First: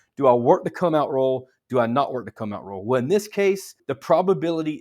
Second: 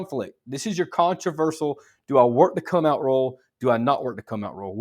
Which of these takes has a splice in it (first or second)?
first